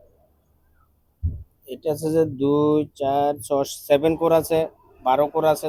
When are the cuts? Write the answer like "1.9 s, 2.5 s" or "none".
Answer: none